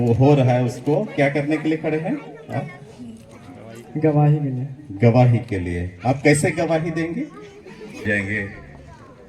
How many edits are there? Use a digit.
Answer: 1